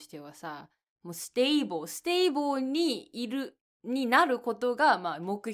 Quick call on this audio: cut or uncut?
uncut